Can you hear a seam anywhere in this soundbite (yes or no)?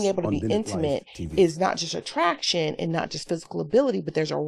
no